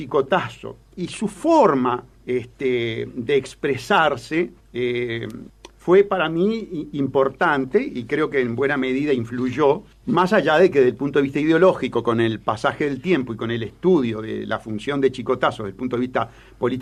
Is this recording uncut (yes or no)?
yes